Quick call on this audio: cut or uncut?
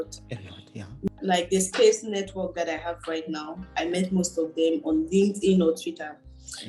cut